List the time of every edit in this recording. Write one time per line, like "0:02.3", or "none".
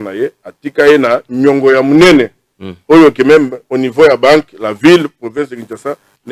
none